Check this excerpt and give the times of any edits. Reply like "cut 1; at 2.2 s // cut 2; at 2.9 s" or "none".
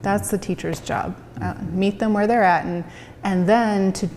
none